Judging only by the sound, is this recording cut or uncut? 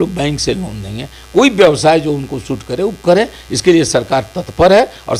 uncut